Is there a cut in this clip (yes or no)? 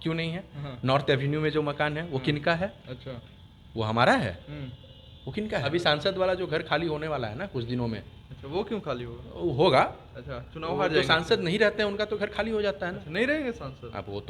yes